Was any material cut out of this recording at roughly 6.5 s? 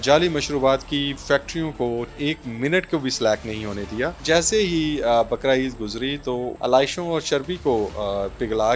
yes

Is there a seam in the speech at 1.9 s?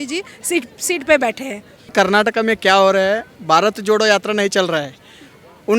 yes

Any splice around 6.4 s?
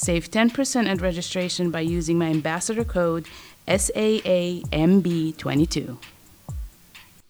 yes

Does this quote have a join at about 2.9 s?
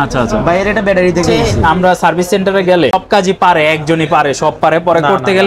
yes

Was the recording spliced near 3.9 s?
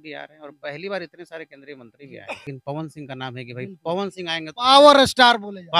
no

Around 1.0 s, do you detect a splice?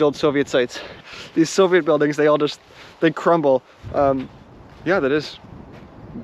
yes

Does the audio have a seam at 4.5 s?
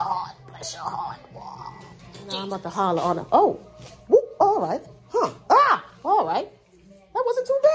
no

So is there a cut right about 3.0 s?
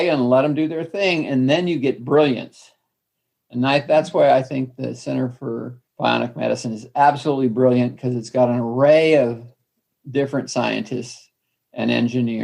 no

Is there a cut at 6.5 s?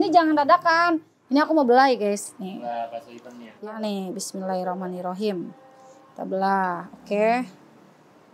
no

